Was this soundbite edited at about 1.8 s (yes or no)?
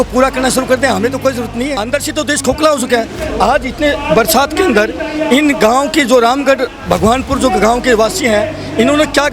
yes